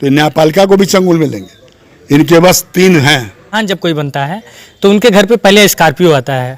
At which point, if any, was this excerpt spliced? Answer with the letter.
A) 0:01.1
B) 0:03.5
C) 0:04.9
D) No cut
B